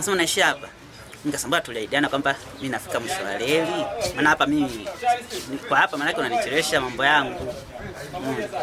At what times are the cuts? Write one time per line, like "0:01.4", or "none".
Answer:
none